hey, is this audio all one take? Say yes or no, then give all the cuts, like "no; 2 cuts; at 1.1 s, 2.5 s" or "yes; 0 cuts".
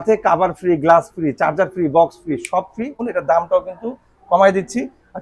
no; 1 cut; at 3.0 s